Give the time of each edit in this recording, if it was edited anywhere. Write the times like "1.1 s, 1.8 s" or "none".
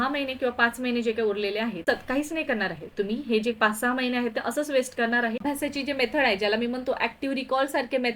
1.8 s, 5.4 s